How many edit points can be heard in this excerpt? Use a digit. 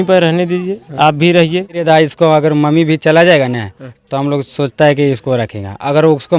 1